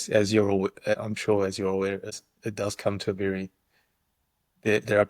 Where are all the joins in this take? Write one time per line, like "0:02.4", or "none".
0:01.0
0:02.1